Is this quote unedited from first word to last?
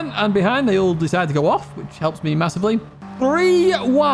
no; 1 cut; at 3.0 s

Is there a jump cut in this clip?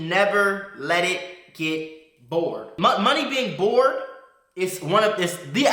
yes; 1 cut; at 2.7 s

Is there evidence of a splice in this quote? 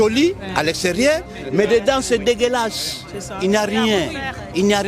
no; 0 cuts

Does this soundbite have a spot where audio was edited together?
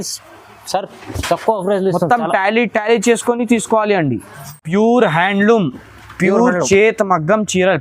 yes; 1 cut; at 4.6 s

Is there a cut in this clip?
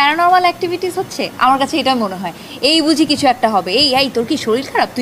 no; 0 cuts

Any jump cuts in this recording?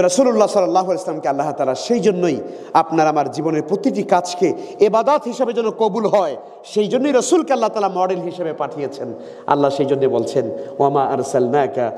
no; 0 cuts

